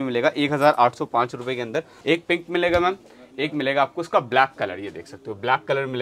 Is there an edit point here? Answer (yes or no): yes